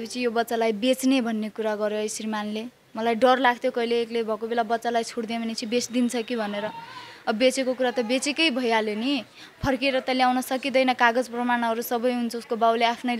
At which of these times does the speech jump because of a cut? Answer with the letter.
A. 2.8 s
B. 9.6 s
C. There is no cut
C